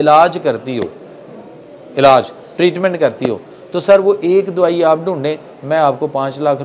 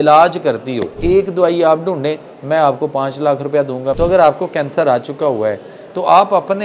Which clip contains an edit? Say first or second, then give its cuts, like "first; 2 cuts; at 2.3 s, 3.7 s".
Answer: second; 2 cuts; at 1.0 s, 4.0 s